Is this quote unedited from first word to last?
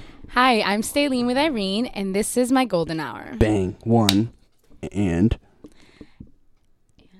yes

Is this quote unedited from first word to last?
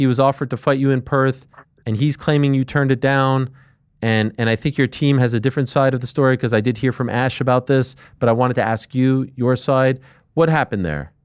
yes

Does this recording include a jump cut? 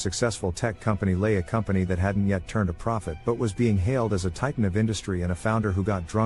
no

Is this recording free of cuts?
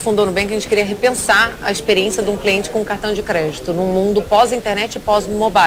yes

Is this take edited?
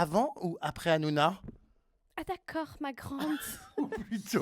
no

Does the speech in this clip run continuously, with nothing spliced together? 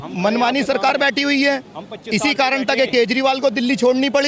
yes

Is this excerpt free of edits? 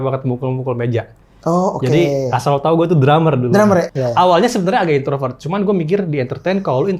no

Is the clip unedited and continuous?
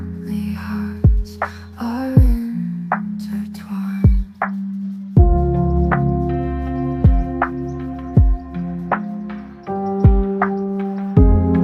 yes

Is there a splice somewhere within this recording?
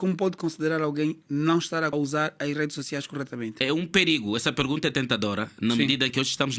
yes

